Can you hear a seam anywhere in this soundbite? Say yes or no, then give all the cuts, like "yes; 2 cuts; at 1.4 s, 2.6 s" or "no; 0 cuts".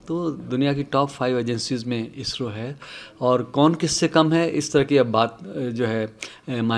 no; 0 cuts